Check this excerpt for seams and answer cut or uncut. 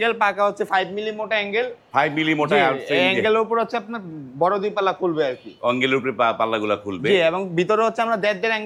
uncut